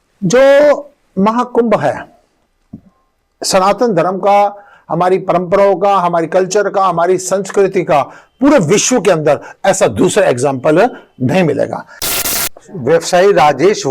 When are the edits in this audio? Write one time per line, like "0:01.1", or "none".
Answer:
0:12.1